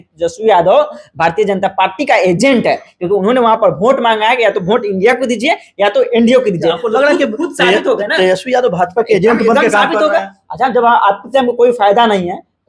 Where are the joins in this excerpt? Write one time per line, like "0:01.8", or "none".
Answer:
none